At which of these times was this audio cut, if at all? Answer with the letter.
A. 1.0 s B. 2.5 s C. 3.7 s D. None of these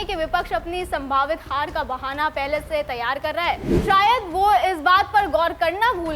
C